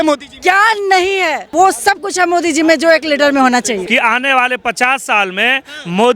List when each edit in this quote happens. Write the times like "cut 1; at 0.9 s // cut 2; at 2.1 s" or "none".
cut 1; at 1.5 s // cut 2; at 3.9 s